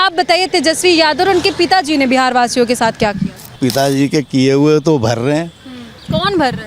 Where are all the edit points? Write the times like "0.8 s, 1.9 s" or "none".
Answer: 3.6 s